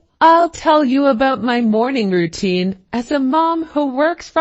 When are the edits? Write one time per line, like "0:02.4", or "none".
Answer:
none